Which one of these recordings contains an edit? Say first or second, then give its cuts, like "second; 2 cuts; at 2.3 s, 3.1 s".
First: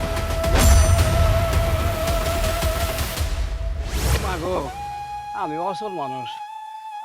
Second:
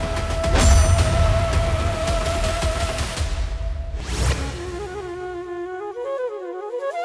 first; 1 cut; at 4.0 s